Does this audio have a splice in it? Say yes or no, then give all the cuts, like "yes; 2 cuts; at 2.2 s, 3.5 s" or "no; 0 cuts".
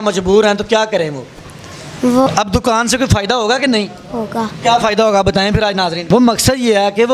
yes; 2 cuts; at 2.3 s, 6.0 s